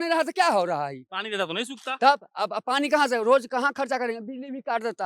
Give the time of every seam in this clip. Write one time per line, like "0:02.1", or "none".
none